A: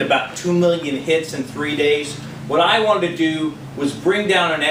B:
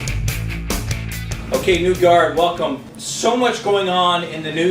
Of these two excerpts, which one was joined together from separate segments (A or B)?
B